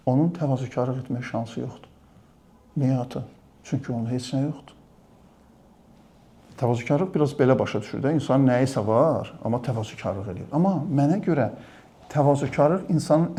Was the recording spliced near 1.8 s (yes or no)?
no